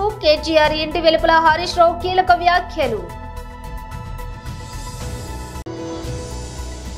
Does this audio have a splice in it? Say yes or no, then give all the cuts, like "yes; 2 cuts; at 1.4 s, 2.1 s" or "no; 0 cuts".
yes; 2 cuts; at 3.1 s, 5.4 s